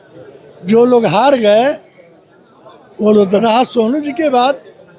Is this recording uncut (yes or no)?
no